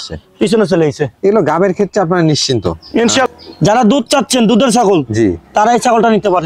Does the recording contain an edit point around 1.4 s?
no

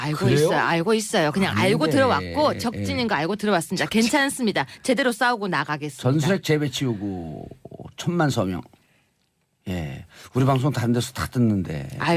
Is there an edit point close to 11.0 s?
no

